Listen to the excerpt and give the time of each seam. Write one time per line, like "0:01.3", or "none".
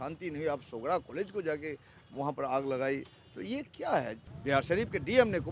0:04.3